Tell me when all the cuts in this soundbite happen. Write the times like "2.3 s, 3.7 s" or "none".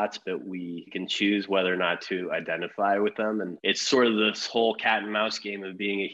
0.9 s, 3.5 s